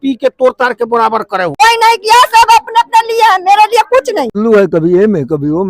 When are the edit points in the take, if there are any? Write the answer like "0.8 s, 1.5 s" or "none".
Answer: 1.5 s, 4.4 s